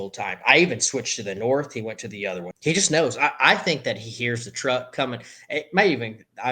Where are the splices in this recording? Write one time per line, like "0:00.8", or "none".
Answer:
0:02.5